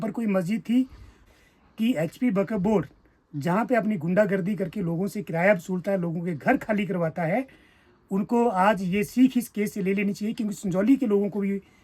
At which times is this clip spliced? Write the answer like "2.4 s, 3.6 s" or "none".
1.3 s

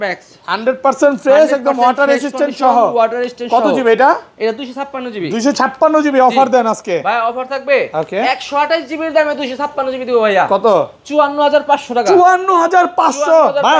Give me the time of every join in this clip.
none

